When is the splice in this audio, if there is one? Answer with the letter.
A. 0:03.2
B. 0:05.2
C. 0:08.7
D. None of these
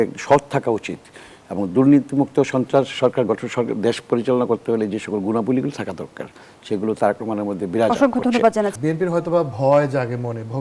C